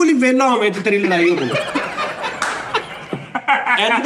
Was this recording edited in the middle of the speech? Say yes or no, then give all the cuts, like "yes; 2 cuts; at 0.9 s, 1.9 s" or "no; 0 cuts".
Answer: no; 0 cuts